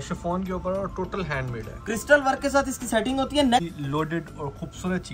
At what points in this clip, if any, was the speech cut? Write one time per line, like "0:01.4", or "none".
0:03.6